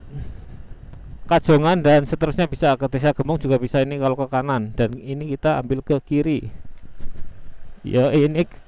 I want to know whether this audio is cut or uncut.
uncut